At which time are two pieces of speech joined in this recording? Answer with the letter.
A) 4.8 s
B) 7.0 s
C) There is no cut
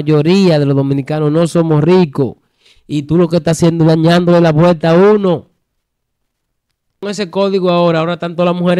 B